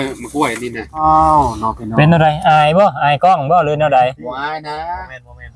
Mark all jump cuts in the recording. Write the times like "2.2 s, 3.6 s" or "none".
1.0 s